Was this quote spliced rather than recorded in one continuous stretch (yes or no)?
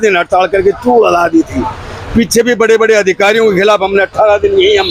no